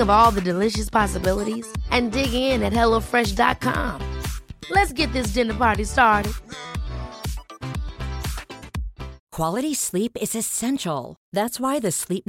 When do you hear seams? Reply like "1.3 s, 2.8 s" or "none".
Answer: 9.2 s